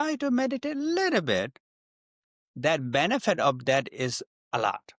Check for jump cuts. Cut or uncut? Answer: uncut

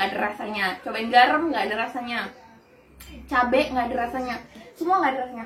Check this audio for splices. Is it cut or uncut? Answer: uncut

